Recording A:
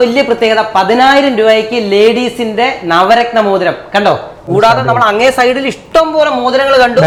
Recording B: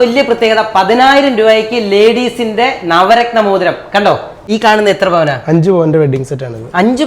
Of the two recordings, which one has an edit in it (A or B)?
B